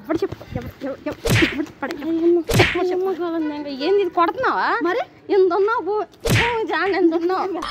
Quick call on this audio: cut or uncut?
uncut